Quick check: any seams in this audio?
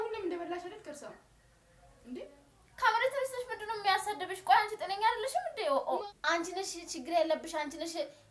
yes; 1 cut; at 5.9 s

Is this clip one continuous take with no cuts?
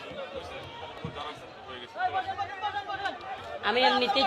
no; 1 cut; at 0.9 s

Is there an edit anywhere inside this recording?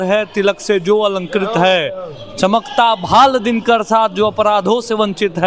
no; 0 cuts

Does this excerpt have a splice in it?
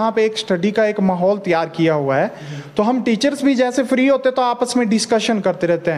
no; 0 cuts

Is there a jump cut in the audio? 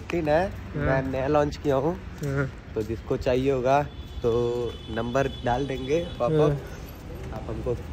no; 0 cuts

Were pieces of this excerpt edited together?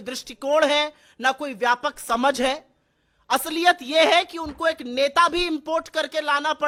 no; 0 cuts

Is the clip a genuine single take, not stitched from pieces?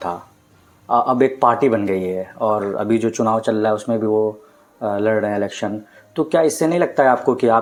yes; 0 cuts

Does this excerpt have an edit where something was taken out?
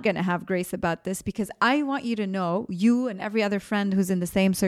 no; 0 cuts

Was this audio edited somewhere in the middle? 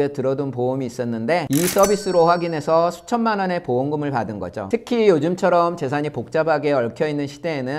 yes; 2 cuts; at 1.5 s, 4.6 s

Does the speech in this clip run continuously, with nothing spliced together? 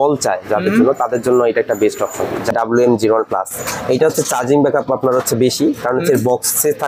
no; 1 cut; at 2.5 s

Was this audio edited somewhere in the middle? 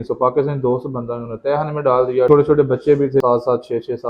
yes; 2 cuts; at 2.3 s, 3.2 s

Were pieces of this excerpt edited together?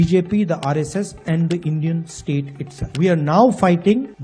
no; 0 cuts

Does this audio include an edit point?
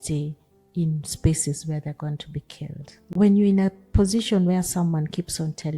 yes; 1 cut; at 3.1 s

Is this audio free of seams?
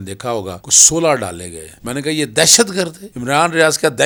yes; 0 cuts

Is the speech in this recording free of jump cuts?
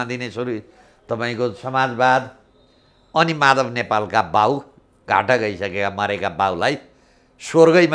yes; 0 cuts

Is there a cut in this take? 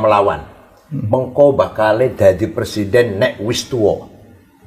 no; 0 cuts

